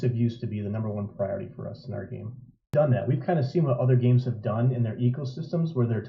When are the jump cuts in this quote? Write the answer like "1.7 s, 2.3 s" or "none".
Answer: 2.7 s